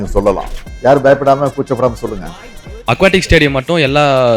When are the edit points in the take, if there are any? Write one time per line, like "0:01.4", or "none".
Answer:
0:02.7